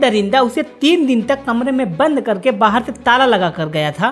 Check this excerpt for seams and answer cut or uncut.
uncut